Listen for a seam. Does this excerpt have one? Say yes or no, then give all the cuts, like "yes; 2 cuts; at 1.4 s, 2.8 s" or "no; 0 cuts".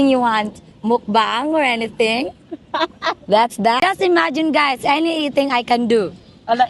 yes; 1 cut; at 3.8 s